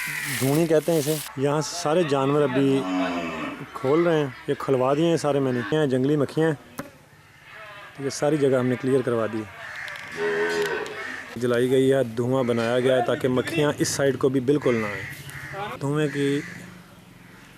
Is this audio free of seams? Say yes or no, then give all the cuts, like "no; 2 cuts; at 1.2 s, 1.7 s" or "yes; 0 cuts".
no; 4 cuts; at 1.3 s, 5.7 s, 11.4 s, 15.7 s